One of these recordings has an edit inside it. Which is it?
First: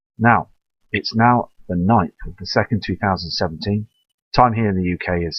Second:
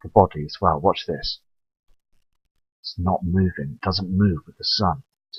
first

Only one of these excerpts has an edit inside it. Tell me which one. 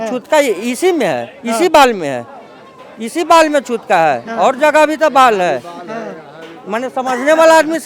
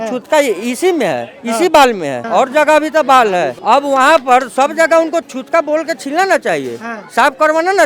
second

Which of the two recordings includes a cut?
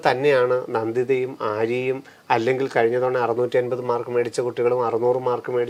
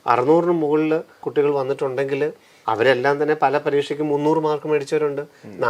second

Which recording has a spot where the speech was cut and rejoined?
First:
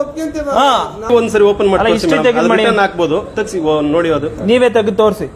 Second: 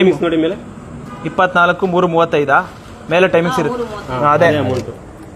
first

